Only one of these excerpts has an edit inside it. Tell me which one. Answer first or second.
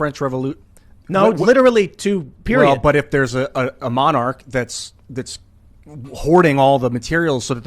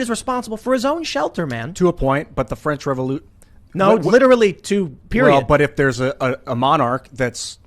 second